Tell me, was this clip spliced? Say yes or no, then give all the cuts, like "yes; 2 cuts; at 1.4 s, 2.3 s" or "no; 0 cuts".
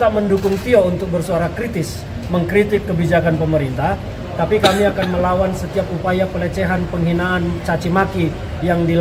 no; 0 cuts